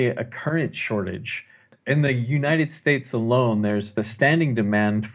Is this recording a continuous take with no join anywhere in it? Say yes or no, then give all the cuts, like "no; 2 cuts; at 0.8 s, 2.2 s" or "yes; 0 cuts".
no; 2 cuts; at 1.8 s, 4.0 s